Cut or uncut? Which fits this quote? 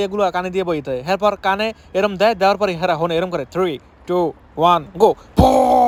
uncut